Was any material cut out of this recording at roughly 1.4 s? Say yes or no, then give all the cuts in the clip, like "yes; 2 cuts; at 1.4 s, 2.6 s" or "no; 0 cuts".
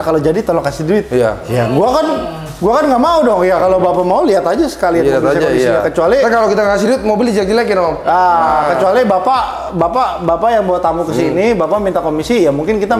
no; 0 cuts